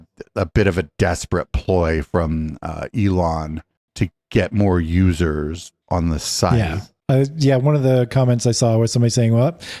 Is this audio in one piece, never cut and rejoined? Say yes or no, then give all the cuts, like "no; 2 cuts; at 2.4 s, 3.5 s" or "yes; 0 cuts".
yes; 0 cuts